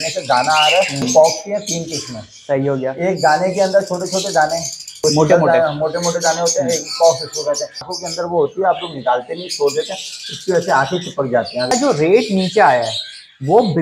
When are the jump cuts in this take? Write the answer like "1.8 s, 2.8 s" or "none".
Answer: 1.1 s, 4.8 s, 7.9 s, 11.7 s

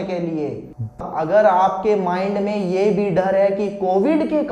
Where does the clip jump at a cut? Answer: 1.0 s

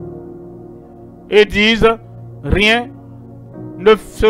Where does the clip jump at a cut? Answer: 1.2 s

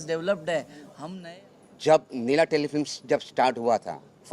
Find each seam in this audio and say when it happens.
1.0 s

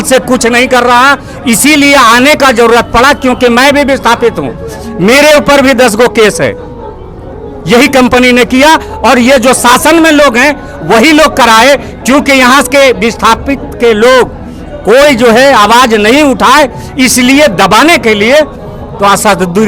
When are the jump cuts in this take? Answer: none

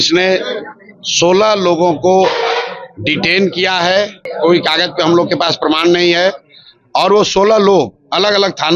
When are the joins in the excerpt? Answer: 4.2 s

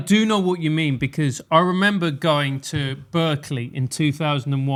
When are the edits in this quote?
none

